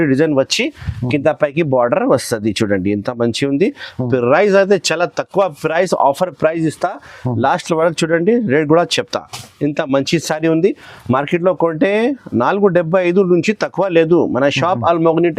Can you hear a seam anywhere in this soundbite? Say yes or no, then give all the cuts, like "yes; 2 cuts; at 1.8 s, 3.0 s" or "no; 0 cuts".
no; 0 cuts